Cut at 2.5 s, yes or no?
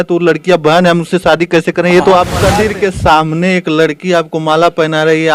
yes